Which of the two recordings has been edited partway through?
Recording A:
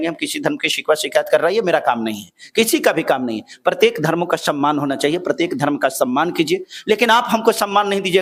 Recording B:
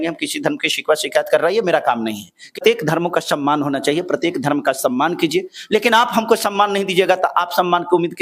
B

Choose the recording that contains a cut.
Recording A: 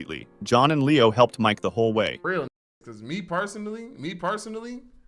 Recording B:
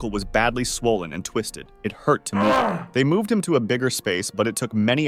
A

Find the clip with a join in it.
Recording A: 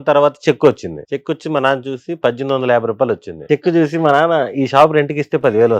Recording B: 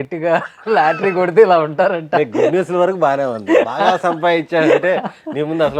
A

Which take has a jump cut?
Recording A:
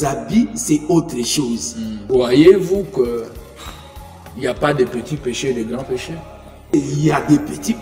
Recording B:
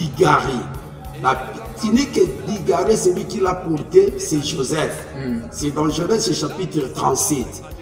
A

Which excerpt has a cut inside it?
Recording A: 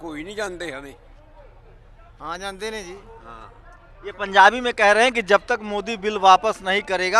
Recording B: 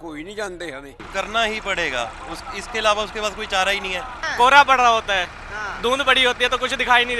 B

